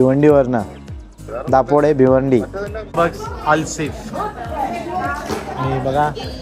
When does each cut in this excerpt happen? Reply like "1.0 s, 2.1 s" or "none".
2.9 s